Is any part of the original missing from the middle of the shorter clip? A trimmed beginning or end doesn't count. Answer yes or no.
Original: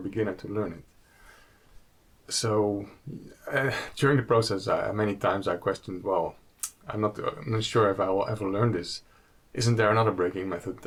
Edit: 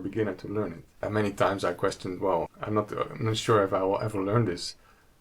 yes